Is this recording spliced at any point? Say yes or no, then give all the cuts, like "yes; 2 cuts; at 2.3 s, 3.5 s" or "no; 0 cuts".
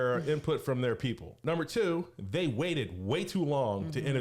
yes; 1 cut; at 1.3 s